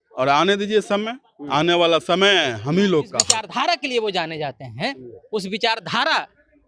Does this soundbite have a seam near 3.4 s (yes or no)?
yes